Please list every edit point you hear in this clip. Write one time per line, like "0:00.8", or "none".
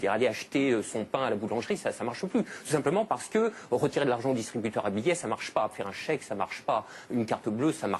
none

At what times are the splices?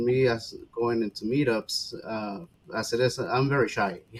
none

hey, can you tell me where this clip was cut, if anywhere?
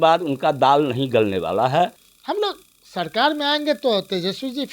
0:02.1

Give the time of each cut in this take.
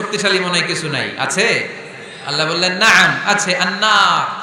none

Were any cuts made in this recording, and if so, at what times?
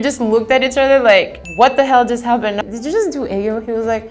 none

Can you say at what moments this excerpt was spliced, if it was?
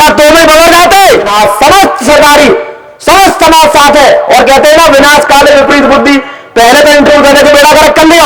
0:01.3

